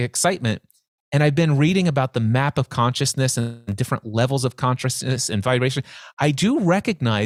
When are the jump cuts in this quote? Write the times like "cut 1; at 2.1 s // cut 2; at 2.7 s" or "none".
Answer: none